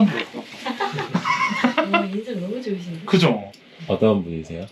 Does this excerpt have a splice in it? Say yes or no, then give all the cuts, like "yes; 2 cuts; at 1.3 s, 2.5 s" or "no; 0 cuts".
no; 0 cuts